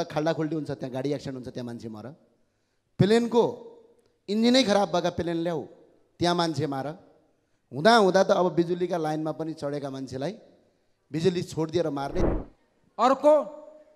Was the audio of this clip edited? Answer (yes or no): yes